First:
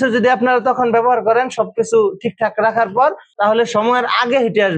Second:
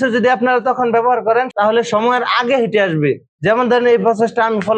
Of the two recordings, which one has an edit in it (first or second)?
second